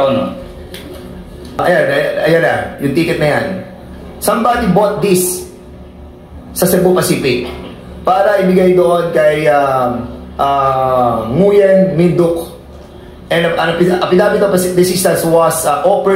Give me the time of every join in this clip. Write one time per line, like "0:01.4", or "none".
0:01.6